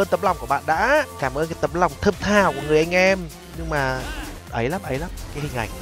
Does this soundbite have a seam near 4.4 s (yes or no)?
yes